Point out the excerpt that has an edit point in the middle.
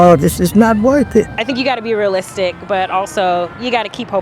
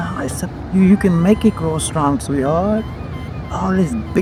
first; 1 cut; at 1.4 s

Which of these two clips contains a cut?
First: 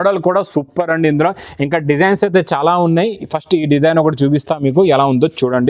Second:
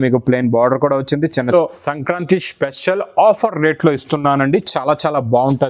second; 1 cut; at 1.5 s

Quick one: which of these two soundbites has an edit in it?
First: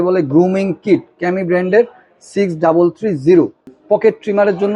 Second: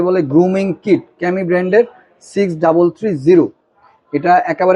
first; 1 cut; at 3.7 s

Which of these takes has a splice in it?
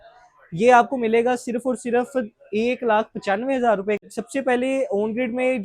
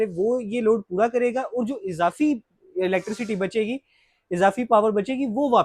first; 1 cut; at 4.0 s

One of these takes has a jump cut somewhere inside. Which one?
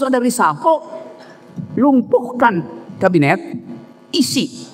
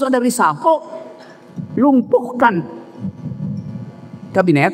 first; 1 cut; at 2.8 s

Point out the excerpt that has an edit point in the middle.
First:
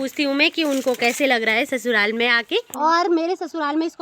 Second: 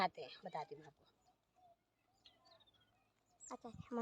first; 1 cut; at 2.7 s

